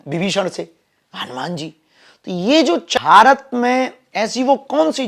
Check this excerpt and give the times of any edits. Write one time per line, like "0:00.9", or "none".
0:02.9